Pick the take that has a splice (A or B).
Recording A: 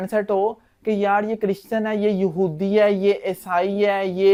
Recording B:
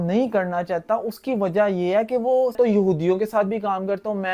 B